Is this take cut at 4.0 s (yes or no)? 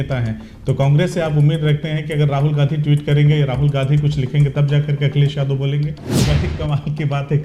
no